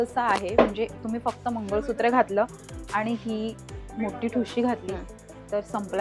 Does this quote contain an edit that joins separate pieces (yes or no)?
no